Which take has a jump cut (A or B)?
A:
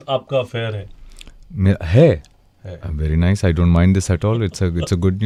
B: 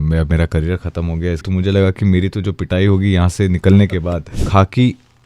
B